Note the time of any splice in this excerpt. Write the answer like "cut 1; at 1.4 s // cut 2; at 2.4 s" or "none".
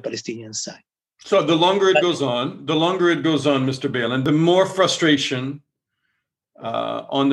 cut 1; at 4.2 s